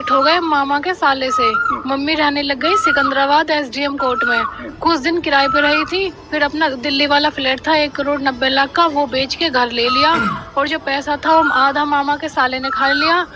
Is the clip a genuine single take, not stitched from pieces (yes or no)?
yes